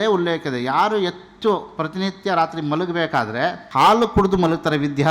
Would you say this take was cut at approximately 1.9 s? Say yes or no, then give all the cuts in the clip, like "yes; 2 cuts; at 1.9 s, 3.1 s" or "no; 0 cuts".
no; 1 cut; at 3.6 s